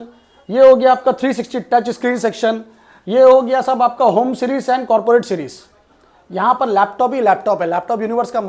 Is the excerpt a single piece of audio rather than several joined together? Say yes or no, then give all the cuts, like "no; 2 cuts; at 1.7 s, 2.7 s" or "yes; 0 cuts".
yes; 0 cuts